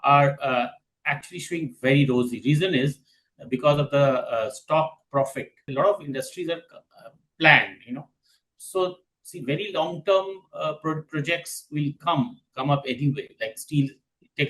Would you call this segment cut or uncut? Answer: cut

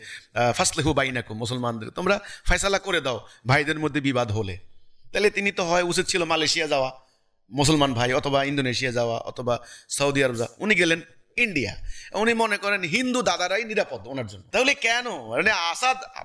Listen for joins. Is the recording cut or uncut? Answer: cut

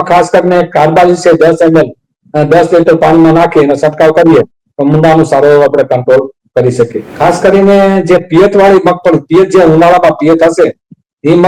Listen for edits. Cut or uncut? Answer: cut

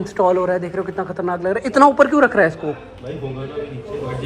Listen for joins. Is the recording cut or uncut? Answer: uncut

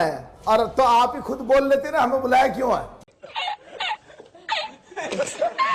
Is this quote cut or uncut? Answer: uncut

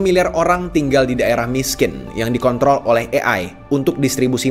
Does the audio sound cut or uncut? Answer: uncut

